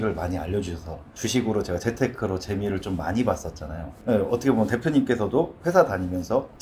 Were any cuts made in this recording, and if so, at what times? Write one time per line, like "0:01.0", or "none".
none